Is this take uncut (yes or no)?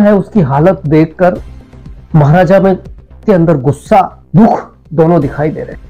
no